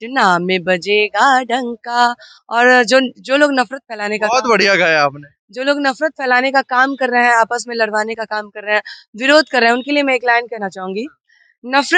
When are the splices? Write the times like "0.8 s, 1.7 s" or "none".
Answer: none